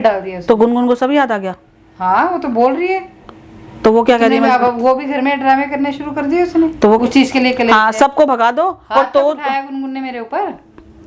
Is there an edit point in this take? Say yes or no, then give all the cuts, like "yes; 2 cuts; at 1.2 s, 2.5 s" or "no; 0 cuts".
yes; 1 cut; at 7.0 s